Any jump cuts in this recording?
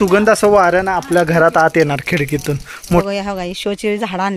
yes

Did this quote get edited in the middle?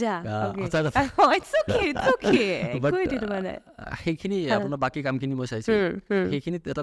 no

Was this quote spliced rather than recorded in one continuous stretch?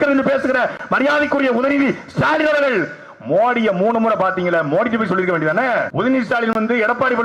yes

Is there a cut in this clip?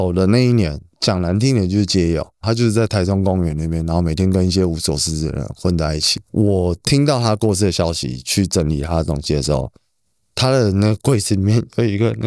yes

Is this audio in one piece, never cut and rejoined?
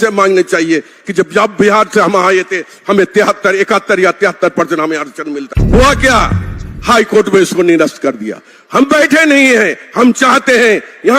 no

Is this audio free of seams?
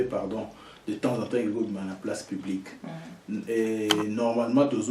yes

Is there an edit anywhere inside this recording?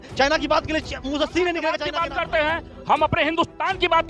yes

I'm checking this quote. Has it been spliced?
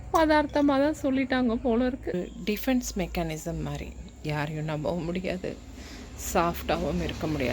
yes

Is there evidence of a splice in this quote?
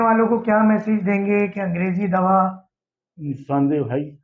no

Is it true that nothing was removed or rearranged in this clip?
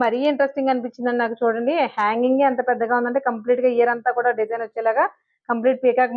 yes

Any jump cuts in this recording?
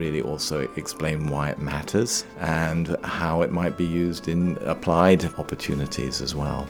yes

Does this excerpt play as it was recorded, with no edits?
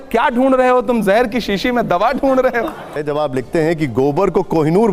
no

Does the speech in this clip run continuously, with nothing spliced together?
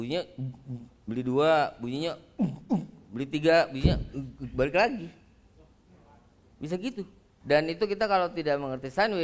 no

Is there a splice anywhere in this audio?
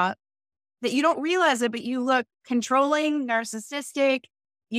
no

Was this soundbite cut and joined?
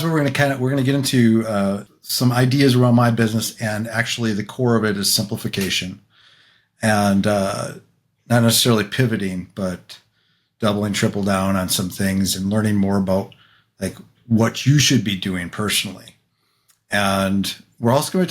yes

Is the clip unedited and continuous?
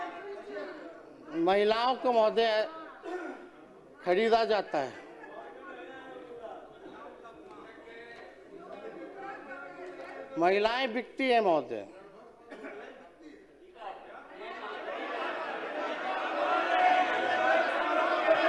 yes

